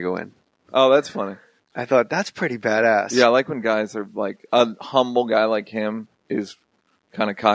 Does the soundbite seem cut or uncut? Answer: uncut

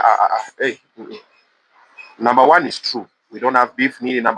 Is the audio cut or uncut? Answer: uncut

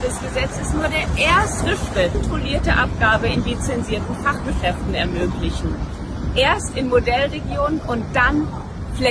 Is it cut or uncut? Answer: cut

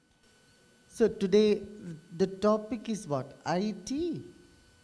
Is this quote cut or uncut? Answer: uncut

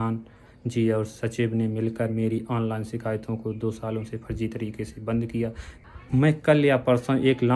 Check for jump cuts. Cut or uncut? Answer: cut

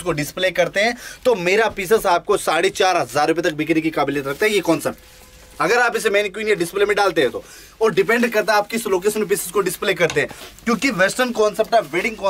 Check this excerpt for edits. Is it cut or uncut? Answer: uncut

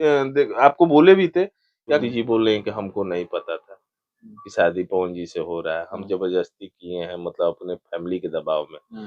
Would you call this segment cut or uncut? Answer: cut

